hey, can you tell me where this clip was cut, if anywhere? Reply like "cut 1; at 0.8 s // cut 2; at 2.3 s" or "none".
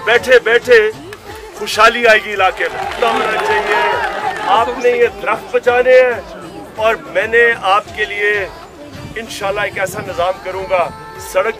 cut 1; at 5.5 s